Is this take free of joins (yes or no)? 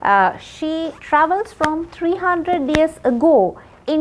yes